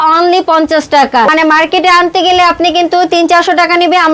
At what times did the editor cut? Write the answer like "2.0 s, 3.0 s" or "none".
1.3 s